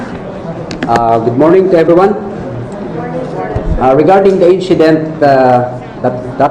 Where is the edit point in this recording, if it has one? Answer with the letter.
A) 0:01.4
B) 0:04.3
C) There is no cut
C